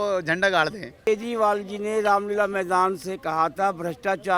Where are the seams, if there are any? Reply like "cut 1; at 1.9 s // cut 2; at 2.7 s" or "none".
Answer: cut 1; at 1.0 s